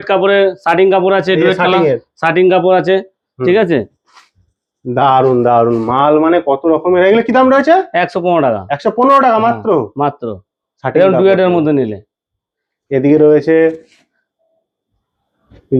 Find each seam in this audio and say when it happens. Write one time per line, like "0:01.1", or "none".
none